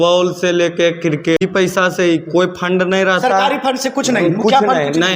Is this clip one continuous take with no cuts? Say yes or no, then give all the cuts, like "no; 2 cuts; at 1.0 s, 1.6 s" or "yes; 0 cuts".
no; 1 cut; at 1.4 s